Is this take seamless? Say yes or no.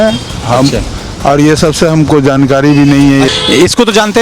no